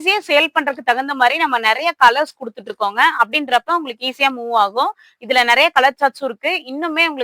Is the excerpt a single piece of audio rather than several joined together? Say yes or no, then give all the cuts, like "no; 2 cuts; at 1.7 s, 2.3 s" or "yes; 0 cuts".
yes; 0 cuts